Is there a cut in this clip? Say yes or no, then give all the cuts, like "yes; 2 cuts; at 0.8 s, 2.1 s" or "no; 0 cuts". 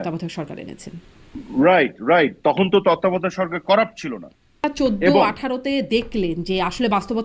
yes; 1 cut; at 4.6 s